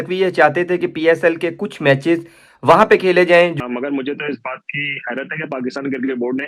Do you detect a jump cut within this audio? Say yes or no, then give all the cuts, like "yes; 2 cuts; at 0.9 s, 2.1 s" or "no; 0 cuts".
yes; 1 cut; at 3.5 s